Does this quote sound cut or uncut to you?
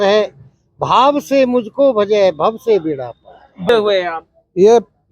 cut